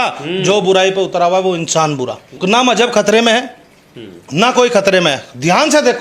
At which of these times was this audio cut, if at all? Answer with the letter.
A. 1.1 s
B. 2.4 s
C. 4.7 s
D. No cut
D